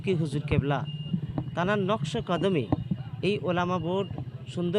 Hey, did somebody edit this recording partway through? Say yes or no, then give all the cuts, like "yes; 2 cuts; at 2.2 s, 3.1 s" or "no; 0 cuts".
no; 0 cuts